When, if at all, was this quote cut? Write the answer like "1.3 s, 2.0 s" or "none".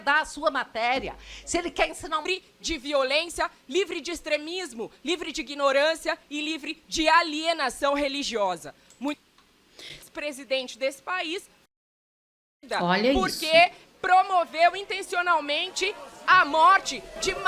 2.2 s, 10.0 s